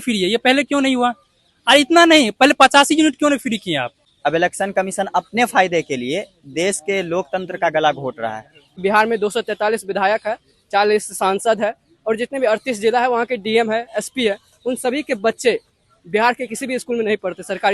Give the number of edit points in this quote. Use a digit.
2